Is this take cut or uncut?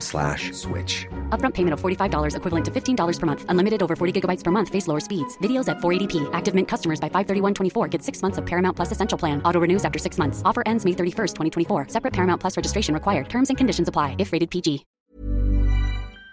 cut